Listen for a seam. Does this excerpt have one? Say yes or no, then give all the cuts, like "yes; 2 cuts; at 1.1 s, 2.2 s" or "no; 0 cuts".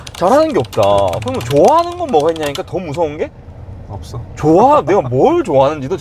no; 0 cuts